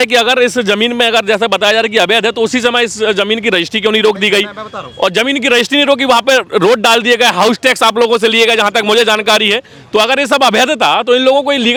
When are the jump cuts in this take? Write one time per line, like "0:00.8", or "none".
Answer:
none